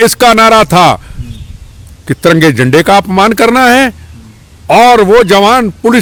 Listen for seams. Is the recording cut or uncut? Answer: uncut